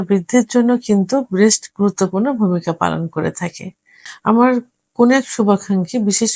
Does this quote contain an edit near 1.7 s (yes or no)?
no